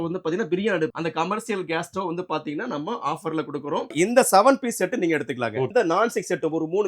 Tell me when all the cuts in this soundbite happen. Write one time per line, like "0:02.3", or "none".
0:00.9
0:03.9
0:05.7